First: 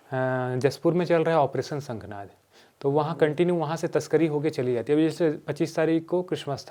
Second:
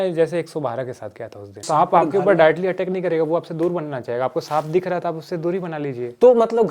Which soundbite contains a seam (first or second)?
second